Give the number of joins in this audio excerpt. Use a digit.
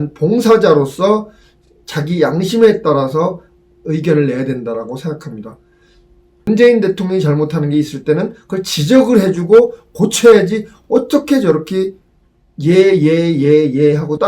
1